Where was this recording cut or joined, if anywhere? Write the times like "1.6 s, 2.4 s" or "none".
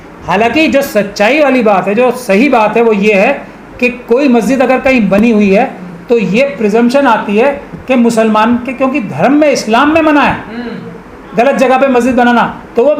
none